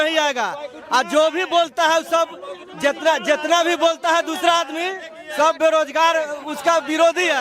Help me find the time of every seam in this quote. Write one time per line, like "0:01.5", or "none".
none